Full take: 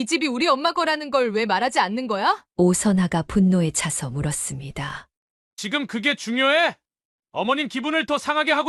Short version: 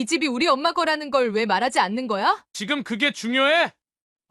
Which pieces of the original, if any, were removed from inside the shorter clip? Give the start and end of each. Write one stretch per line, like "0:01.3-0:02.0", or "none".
0:02.5-0:05.5